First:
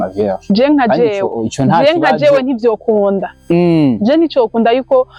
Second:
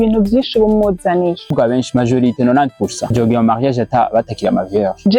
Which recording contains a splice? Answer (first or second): second